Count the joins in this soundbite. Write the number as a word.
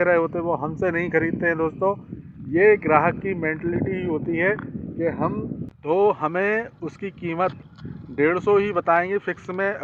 one